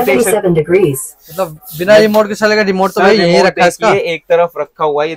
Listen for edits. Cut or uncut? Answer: uncut